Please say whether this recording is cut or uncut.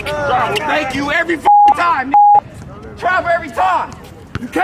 uncut